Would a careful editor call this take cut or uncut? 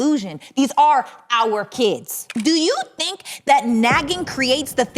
cut